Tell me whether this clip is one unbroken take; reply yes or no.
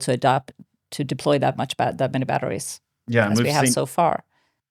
yes